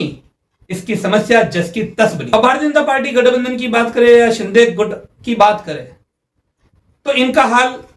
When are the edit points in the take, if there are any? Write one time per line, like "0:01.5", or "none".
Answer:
0:02.2

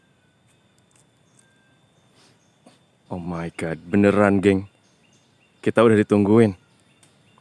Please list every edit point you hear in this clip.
0:03.0

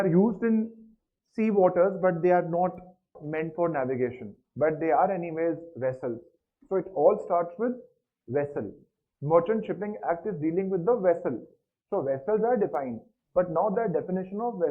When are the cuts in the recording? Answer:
0:03.2

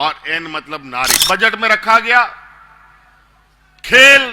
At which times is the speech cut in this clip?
0:01.2

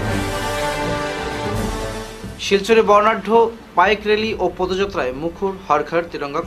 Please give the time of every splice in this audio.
0:01.8

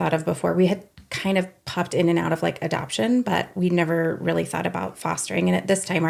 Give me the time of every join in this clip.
none

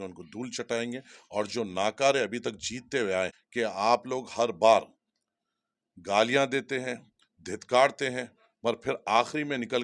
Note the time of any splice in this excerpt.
0:03.4

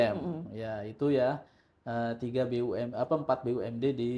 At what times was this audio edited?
none

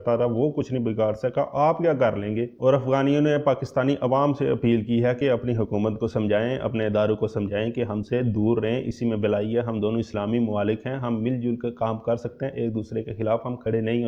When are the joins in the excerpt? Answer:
none

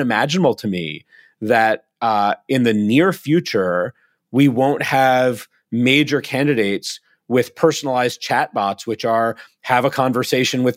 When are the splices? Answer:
none

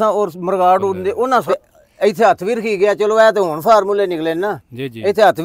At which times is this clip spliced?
0:01.5

